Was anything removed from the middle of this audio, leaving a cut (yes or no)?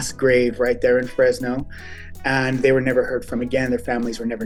no